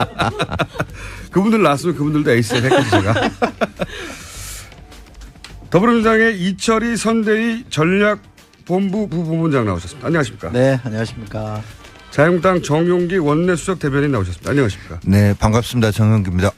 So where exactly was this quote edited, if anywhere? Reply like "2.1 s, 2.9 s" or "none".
none